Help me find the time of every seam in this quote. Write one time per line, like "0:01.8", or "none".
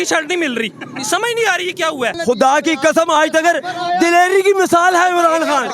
0:02.2